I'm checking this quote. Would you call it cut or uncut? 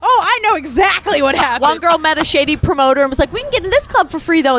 cut